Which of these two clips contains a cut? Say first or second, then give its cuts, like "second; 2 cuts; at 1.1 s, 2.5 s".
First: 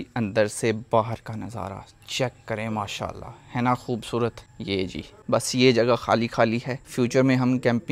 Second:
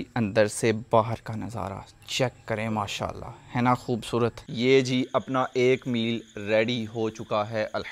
second; 1 cut; at 4.4 s